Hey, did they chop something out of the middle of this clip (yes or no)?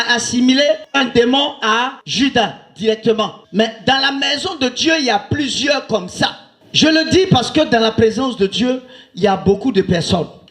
yes